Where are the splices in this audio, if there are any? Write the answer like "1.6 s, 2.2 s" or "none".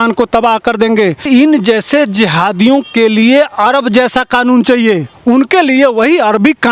1.2 s, 5.1 s